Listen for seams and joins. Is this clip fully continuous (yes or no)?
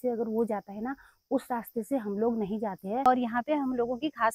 no